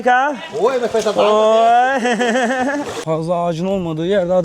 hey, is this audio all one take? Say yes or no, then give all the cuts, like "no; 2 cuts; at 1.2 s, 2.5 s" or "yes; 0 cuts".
no; 1 cut; at 3.0 s